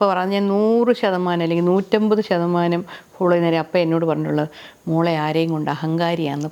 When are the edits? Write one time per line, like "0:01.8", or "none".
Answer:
none